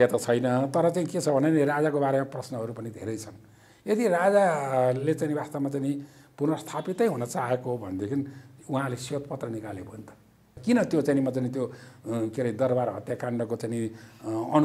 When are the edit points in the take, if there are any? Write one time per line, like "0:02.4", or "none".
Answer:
0:10.6